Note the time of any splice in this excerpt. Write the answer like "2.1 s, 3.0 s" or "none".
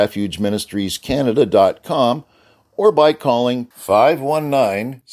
none